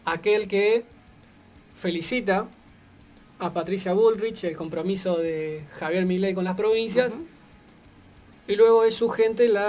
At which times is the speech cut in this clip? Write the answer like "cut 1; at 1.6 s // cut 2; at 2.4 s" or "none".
none